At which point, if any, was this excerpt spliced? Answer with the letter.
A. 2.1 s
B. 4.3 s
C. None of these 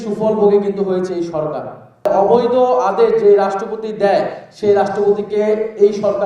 A